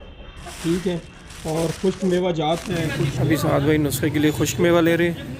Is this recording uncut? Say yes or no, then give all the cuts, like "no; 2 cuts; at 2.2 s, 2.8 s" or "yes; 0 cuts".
no; 1 cut; at 3.1 s